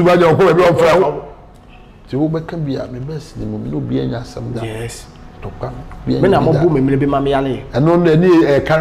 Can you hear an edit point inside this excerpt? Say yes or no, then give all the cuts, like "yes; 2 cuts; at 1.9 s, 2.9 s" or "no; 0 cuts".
no; 0 cuts